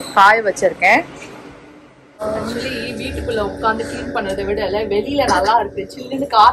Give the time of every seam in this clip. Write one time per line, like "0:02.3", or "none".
0:02.2